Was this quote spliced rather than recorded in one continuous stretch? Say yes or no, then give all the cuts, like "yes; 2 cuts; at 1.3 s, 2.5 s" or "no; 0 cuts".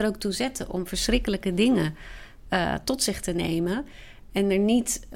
no; 0 cuts